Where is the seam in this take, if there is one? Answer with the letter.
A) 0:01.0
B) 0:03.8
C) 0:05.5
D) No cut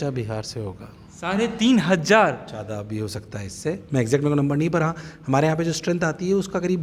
D